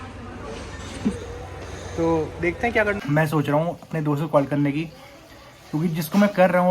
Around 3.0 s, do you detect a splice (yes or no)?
yes